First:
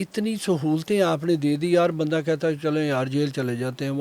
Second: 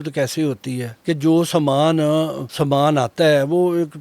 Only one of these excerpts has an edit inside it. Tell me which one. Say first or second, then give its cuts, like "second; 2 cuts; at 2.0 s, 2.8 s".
second; 2 cuts; at 0.9 s, 2.4 s